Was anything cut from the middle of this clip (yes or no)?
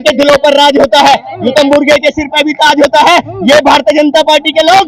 no